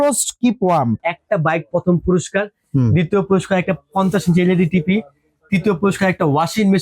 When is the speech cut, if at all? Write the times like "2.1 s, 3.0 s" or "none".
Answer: 1.1 s